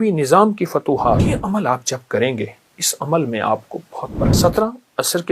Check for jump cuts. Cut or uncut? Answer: cut